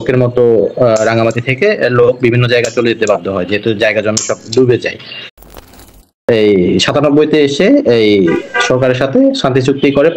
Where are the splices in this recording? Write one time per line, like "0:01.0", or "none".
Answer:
0:05.7